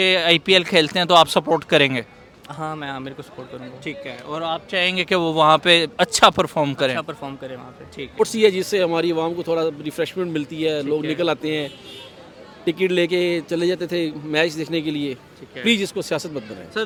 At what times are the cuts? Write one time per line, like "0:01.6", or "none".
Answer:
none